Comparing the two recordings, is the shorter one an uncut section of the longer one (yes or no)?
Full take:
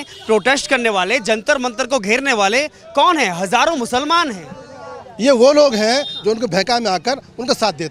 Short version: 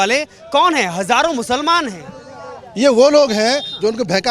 yes